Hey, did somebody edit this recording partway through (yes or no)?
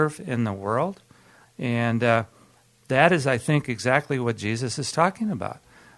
yes